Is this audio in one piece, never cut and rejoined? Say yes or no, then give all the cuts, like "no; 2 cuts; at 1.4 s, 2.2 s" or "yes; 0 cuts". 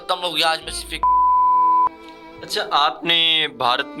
yes; 0 cuts